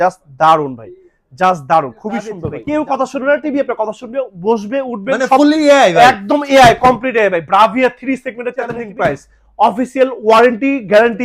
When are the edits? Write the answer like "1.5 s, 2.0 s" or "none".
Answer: 2.5 s, 8.8 s

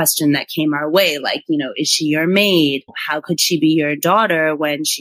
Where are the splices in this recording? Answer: 2.9 s

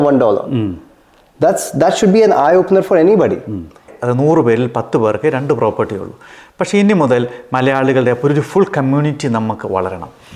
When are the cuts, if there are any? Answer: 3.9 s

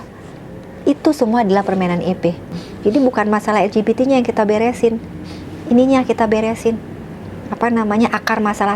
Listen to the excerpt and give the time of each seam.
2.5 s

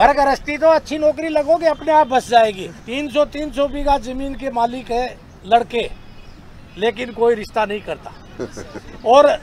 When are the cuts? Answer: 2.7 s

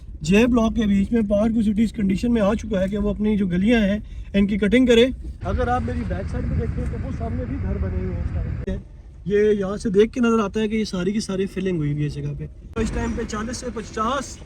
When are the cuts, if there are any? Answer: 5.3 s, 8.7 s, 12.7 s

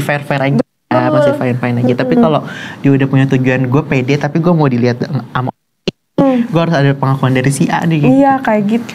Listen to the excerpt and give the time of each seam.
none

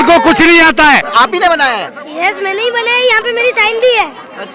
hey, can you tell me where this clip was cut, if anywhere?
1.1 s

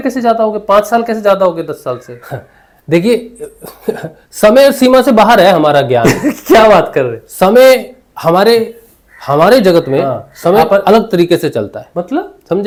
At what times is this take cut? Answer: none

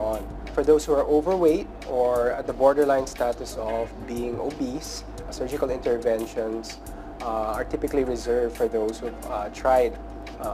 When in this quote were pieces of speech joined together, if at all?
1.3 s

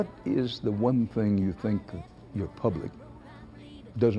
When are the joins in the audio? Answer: none

